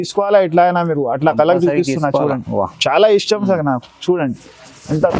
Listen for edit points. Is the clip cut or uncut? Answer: uncut